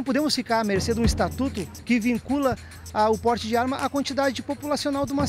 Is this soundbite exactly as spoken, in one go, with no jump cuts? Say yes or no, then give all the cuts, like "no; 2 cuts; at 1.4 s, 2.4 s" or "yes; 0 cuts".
yes; 0 cuts